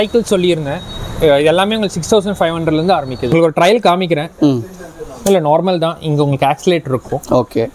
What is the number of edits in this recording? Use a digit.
1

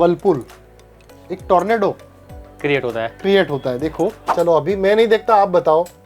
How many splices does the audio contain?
1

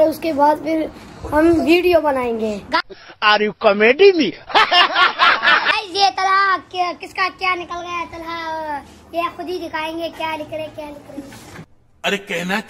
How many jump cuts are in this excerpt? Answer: 0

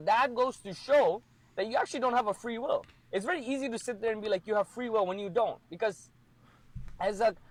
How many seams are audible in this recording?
0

